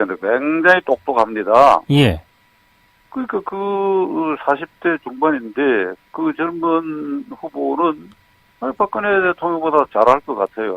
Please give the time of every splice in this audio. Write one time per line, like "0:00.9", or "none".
0:09.2